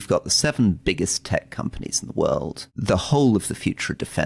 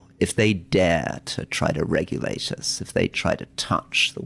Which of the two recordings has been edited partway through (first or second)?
first